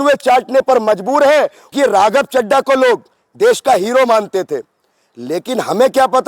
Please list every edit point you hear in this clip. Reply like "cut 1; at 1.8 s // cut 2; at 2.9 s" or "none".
cut 1; at 1.6 s